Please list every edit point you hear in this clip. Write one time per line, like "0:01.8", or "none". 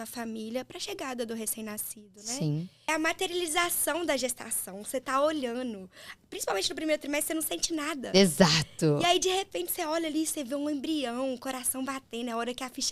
0:02.9